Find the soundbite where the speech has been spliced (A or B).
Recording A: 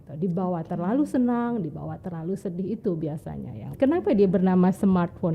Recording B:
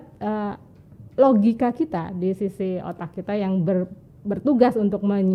A